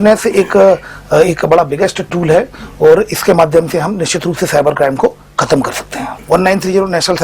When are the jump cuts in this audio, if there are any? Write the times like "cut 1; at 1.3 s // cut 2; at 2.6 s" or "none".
cut 1; at 6.1 s